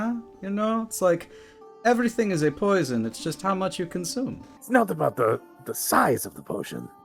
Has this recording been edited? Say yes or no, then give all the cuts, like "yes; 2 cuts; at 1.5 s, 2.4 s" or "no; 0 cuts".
yes; 1 cut; at 4.6 s